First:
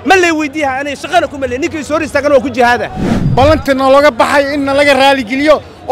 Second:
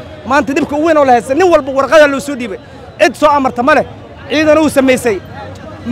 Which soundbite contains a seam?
first; 1 cut; at 3.2 s

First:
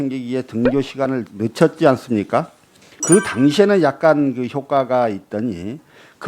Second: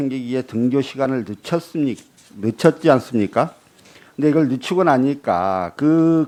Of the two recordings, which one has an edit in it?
first; 2 cuts; at 1.3 s, 3.0 s

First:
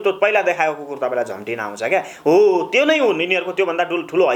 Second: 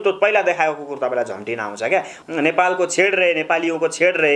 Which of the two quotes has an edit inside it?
second; 1 cut; at 2.1 s

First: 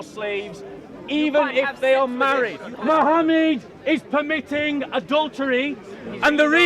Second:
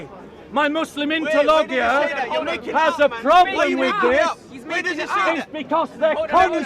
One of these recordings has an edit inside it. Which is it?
first; 1 cut; at 2.7 s

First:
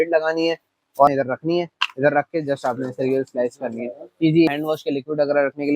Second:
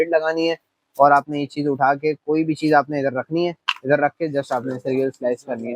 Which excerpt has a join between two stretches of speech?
first; 2 cuts; at 1.1 s, 4.5 s

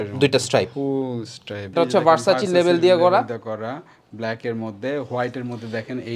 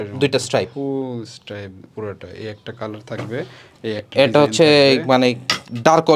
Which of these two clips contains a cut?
first; 1 cut; at 1.7 s

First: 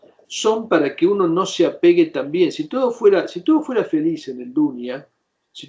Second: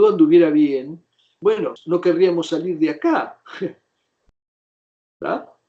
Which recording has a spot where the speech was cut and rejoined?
second; 1 cut; at 1.8 s

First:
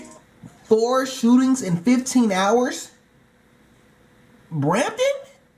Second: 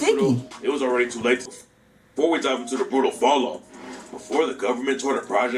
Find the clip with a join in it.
second; 1 cut; at 1.5 s

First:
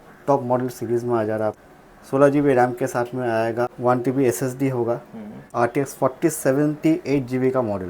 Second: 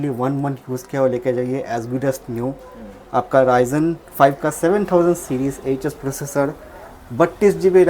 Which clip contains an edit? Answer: first; 3 cuts; at 1.6 s, 3.7 s, 5.4 s

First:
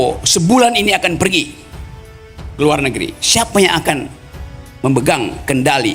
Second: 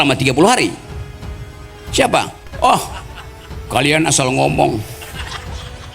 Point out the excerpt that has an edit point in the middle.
second; 1 cut; at 2.4 s

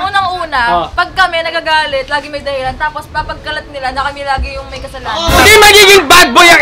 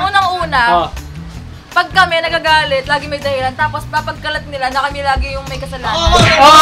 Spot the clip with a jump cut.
first; 2 cuts; at 0.9 s, 5.4 s

